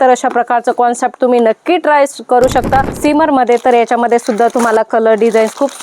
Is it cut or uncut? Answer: cut